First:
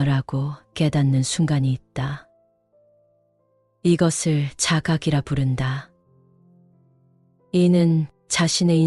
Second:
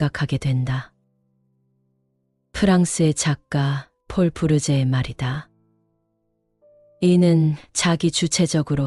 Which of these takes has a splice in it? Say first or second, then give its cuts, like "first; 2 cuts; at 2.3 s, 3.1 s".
first; 2 cuts; at 6.0 s, 7.5 s